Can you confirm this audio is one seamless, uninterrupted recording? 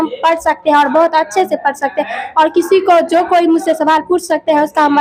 yes; 0 cuts

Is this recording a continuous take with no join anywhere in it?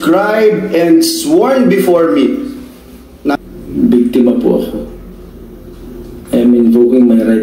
no; 1 cut; at 3.4 s

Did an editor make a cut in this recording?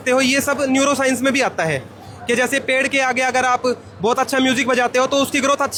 no; 0 cuts

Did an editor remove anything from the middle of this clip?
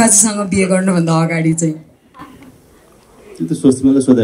no; 0 cuts

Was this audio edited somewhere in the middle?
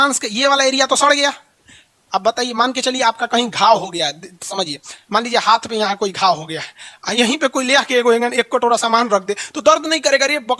no; 0 cuts

